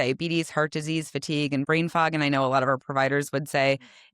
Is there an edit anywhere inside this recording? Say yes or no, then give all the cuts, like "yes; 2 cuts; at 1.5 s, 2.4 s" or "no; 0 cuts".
yes; 1 cut; at 1.7 s